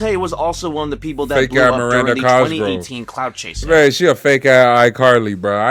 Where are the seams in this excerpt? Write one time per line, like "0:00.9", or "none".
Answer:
none